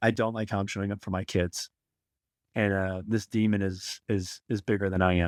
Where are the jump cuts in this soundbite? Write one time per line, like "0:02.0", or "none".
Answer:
none